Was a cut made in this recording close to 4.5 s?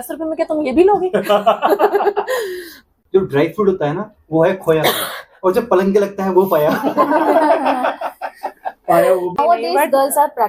no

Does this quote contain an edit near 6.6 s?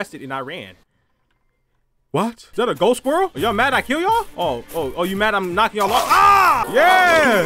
yes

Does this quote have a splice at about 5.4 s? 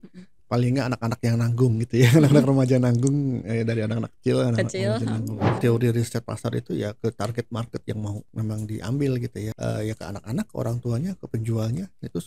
yes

